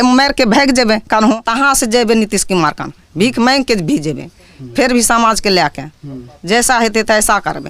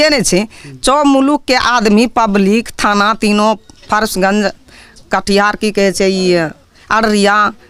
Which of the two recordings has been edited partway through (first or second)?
first